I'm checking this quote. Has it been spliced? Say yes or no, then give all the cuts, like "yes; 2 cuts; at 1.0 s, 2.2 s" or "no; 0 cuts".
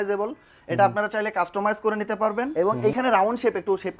yes; 1 cut; at 2.5 s